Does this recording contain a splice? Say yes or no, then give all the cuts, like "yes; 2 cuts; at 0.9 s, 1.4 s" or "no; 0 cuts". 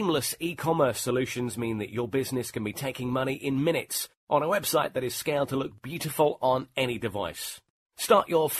no; 0 cuts